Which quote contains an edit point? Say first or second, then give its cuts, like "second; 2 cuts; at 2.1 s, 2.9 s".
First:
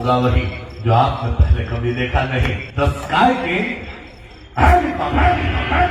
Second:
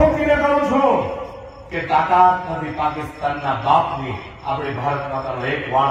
first; 1 cut; at 2.6 s